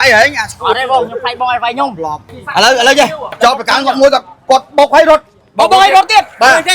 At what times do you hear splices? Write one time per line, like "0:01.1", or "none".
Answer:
0:02.4
0:03.4